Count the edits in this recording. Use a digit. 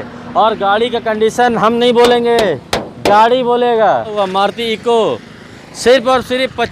1